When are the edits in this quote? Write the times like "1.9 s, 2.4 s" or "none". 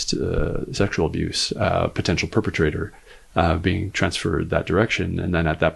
none